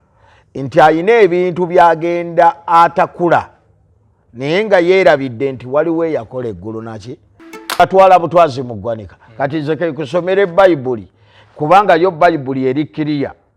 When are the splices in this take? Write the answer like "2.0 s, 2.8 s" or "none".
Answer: 7.8 s